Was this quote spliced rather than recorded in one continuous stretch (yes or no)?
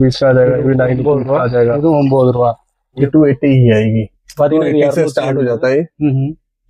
yes